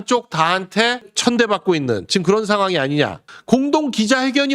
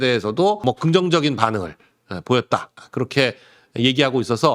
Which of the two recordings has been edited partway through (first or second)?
first